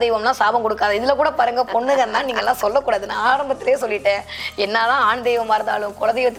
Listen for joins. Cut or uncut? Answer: uncut